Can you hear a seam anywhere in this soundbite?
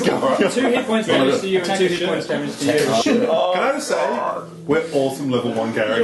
yes; 1 cut; at 3.0 s

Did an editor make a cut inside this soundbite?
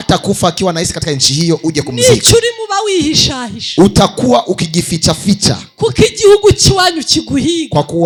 no; 0 cuts

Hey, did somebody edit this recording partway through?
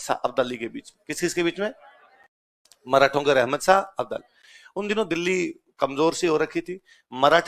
no; 0 cuts

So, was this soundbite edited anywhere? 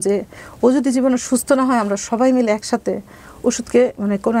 no; 0 cuts

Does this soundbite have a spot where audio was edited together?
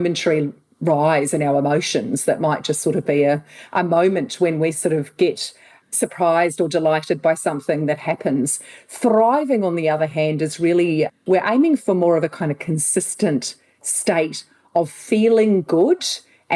yes; 1 cut; at 5.9 s

